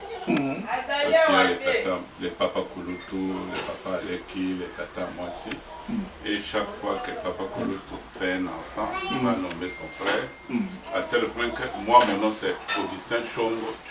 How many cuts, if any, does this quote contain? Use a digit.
0